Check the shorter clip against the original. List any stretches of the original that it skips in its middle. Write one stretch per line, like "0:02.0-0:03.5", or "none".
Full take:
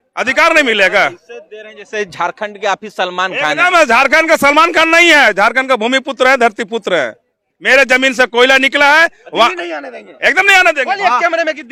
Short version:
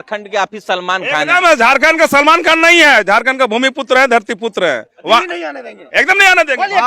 0:07.2-0:09.2